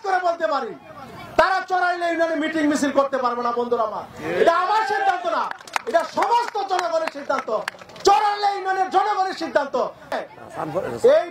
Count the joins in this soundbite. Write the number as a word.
one